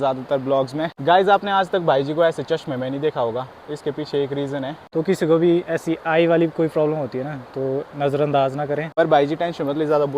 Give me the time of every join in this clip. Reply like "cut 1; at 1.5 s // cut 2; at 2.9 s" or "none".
cut 1; at 0.9 s // cut 2; at 4.8 s // cut 3; at 8.9 s